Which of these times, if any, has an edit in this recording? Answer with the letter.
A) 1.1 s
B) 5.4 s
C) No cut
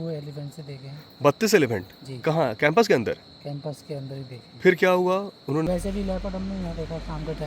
B